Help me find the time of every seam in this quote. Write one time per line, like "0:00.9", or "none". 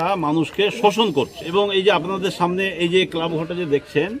0:01.4